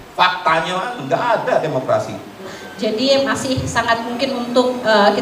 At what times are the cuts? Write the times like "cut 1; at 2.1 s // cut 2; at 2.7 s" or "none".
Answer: cut 1; at 2.4 s